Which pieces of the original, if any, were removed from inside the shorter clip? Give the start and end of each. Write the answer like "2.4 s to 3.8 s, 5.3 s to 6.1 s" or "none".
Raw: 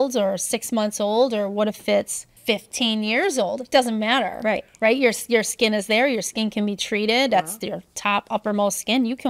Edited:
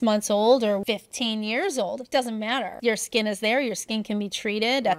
1.5 s to 2.4 s, 4.3 s to 5.2 s

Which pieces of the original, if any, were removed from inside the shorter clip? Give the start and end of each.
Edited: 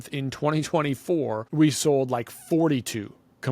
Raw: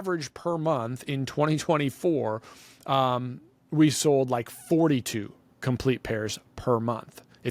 2.4 s to 3.6 s

